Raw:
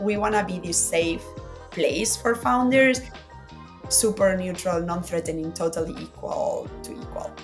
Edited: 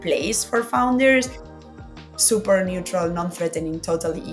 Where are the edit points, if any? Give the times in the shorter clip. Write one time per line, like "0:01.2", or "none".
none